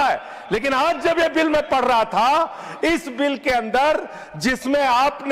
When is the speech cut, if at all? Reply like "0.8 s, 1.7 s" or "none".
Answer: none